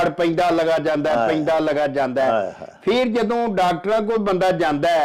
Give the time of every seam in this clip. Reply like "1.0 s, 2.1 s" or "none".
none